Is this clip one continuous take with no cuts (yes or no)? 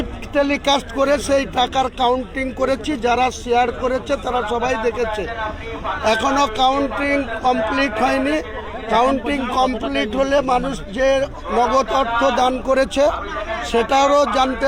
yes